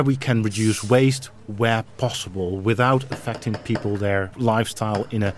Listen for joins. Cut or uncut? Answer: cut